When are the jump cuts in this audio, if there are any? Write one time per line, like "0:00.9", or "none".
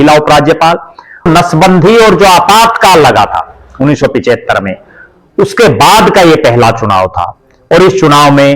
0:01.3